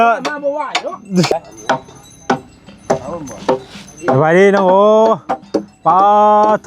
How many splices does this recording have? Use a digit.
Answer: 1